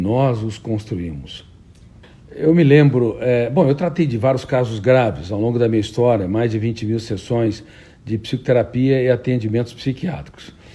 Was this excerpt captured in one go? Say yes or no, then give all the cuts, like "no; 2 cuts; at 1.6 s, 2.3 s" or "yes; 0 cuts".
yes; 0 cuts